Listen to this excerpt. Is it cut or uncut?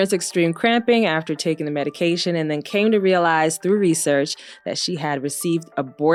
uncut